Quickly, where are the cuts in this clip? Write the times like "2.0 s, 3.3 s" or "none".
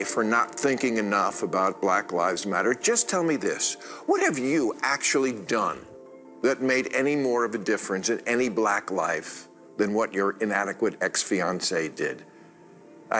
1.3 s